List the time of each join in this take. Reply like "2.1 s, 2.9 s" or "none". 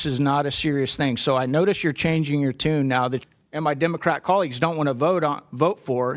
3.2 s